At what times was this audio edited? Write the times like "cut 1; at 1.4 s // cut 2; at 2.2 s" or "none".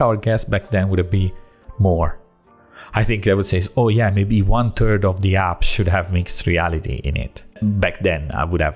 cut 1; at 7.6 s